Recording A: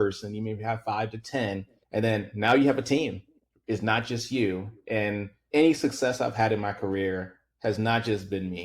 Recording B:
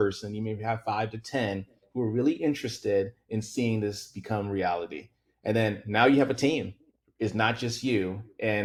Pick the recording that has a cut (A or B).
A